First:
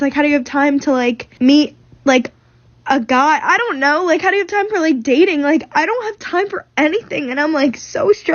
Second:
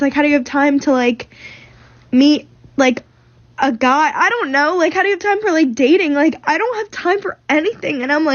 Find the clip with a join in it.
first; 1 cut; at 1.3 s

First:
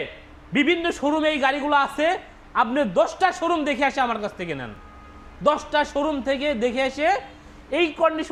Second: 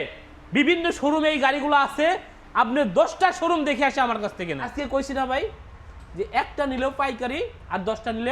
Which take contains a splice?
second; 1 cut; at 4.7 s

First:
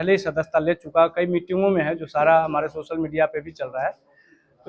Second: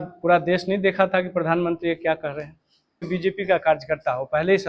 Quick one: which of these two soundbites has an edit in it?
second; 1 cut; at 3.1 s

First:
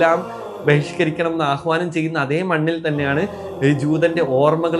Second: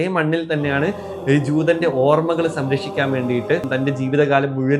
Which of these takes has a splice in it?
second; 1 cut; at 3.7 s

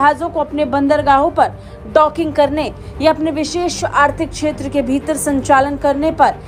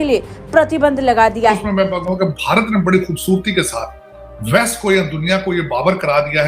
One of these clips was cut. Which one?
second; 1 cut; at 1.7 s

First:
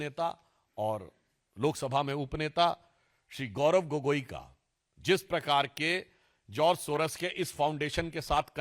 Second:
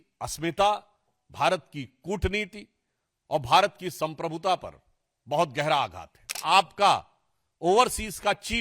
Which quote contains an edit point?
second; 1 cut; at 6.3 s

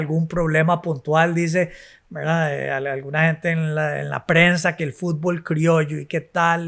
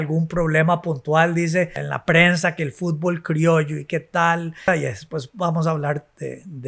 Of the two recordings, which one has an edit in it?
second; 2 cuts; at 1.9 s, 4.7 s

